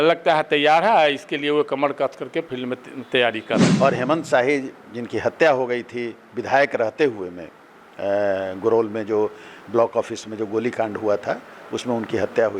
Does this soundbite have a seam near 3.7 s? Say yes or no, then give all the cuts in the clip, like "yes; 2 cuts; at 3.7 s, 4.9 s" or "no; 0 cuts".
yes; 1 cut; at 3.7 s